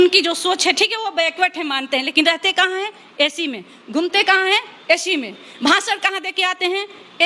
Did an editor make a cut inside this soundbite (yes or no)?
no